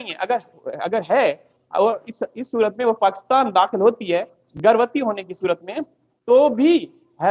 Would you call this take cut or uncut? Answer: uncut